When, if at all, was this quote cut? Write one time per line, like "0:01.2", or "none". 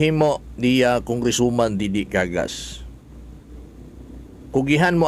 none